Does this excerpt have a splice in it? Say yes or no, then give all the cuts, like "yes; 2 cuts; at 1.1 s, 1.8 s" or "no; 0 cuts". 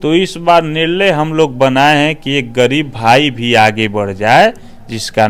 no; 0 cuts